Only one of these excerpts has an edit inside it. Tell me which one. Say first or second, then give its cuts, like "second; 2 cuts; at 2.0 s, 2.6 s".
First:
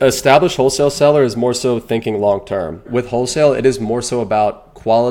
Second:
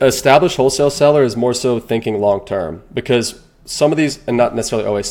first; 1 cut; at 2.9 s